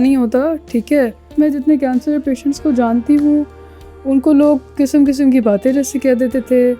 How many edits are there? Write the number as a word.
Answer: one